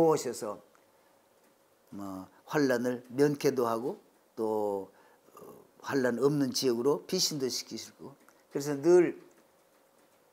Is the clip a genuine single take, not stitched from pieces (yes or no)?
yes